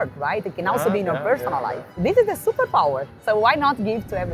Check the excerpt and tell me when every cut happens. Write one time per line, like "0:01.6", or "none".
0:02.0
0:03.2